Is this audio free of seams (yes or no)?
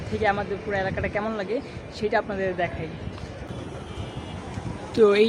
yes